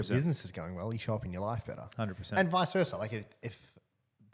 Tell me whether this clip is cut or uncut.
uncut